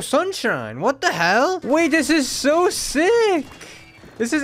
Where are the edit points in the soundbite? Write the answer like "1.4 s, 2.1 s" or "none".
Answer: 1.6 s